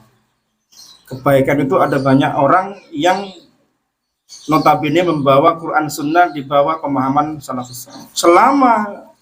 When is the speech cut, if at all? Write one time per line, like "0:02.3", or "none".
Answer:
0:08.0

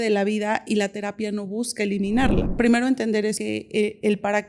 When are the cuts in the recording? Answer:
0:02.5
0:03.4

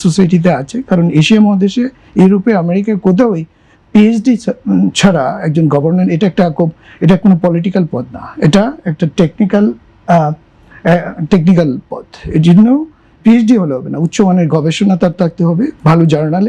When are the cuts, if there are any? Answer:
none

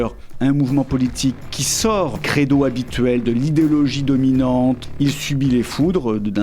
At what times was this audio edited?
0:02.2
0:04.9

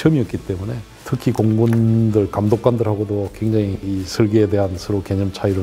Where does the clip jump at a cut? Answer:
none

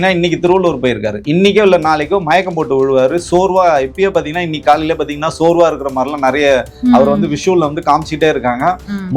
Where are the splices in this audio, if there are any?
none

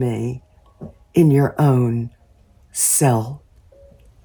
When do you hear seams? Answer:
none

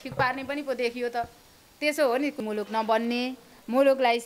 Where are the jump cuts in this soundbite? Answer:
0:02.4

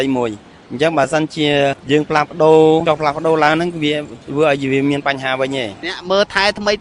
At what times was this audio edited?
0:01.8
0:02.8
0:05.9

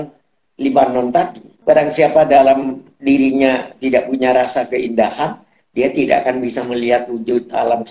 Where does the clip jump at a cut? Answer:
0:01.5

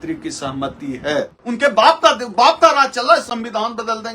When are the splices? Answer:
0:01.4

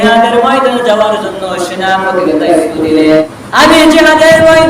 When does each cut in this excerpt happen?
0:03.3

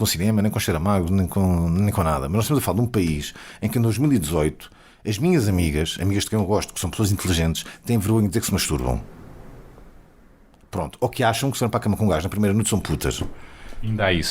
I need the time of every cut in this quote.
none

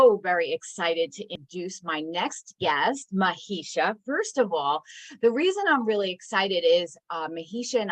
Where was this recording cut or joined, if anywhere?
0:01.4

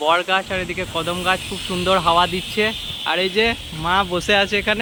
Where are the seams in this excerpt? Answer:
none

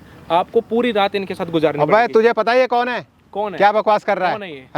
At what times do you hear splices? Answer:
none

